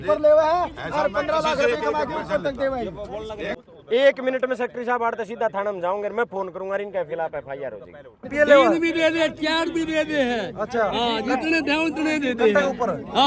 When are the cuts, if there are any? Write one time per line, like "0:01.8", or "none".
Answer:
0:03.6
0:08.3